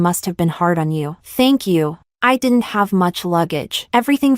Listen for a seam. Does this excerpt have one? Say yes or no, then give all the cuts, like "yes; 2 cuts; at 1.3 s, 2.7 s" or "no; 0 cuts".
yes; 1 cut; at 2.0 s